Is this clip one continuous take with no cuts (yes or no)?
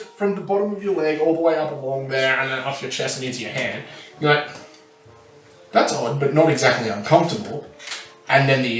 yes